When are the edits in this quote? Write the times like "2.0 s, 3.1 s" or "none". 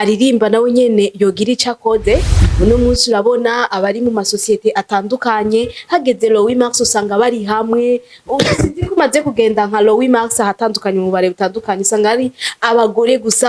none

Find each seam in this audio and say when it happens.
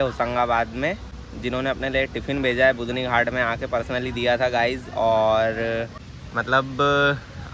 none

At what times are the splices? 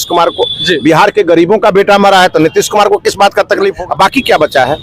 3.8 s

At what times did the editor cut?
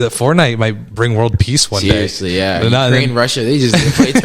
none

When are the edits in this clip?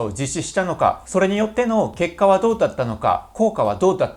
1.0 s

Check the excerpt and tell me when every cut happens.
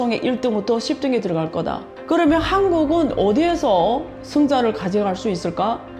1.9 s

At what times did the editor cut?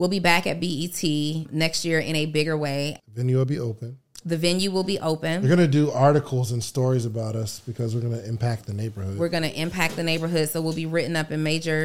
1.5 s, 3.0 s

